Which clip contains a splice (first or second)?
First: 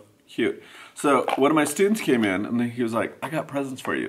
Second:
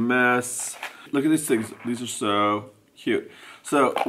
second